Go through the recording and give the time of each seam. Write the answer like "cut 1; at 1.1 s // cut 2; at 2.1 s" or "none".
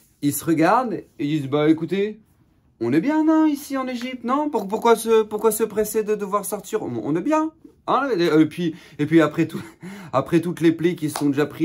none